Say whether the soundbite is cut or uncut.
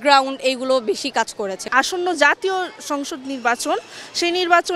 cut